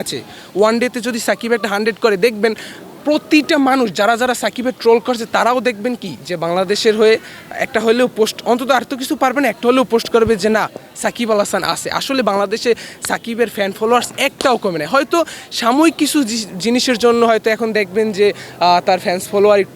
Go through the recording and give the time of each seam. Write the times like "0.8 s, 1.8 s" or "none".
none